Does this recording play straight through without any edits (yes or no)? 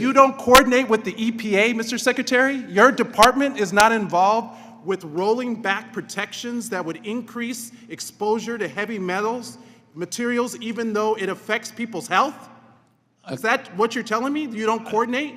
yes